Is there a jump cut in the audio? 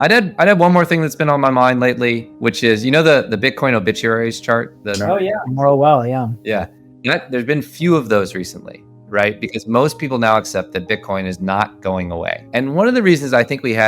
yes; 3 cuts; at 2.3 s, 4.8 s, 12.4 s

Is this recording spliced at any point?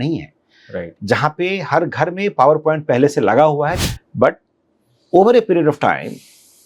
yes; 1 cut; at 3.8 s

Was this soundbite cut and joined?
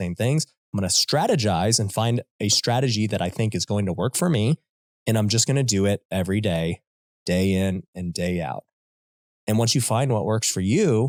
no; 0 cuts

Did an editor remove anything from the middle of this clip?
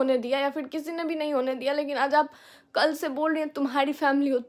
no; 0 cuts

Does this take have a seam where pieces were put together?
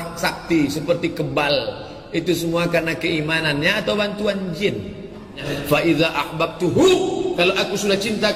yes; 1 cut; at 5.5 s

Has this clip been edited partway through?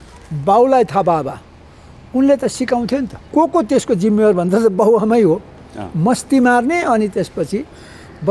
yes; 1 cut; at 3.2 s

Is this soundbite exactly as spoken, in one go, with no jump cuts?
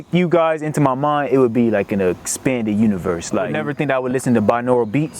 no; 1 cut; at 3.5 s

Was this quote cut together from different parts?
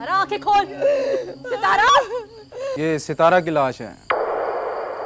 yes; 1 cut; at 2.6 s

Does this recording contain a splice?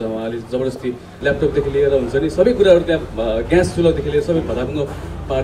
yes; 1 cut; at 1.1 s

